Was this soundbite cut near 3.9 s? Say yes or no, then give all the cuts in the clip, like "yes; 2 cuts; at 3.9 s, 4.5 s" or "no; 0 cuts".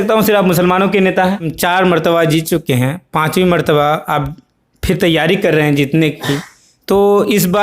no; 1 cut; at 1.5 s